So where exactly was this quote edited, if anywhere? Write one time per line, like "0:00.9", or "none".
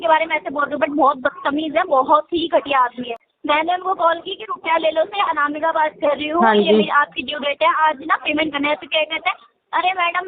0:03.1

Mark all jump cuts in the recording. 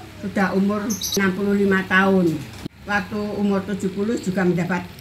0:01.1
0:02.5

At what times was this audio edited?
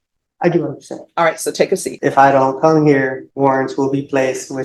0:01.9
0:03.2

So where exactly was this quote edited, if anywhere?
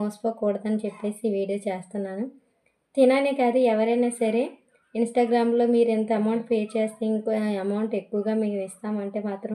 none

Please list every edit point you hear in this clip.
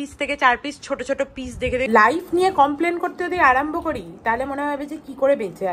0:01.9

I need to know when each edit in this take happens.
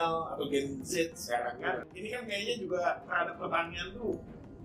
0:01.9

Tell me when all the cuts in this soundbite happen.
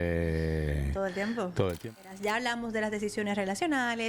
0:02.1

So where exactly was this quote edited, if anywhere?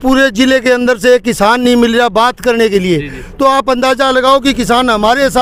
none

